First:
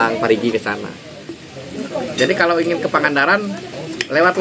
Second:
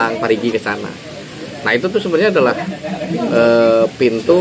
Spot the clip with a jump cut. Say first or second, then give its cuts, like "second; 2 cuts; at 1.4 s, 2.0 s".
first; 1 cut; at 1.5 s